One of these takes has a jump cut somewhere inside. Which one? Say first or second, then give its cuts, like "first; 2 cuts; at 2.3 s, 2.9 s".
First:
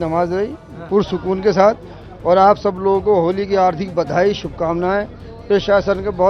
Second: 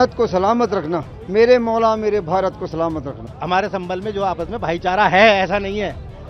second; 2 cuts; at 1.1 s, 3.2 s